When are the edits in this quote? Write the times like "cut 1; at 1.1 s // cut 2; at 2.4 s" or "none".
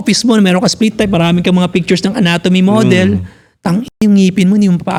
none